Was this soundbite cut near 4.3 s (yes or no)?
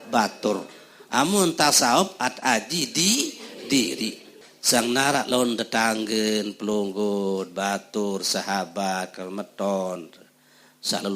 yes